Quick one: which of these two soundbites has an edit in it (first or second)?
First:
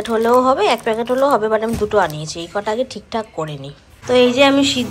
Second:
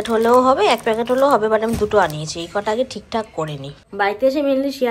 second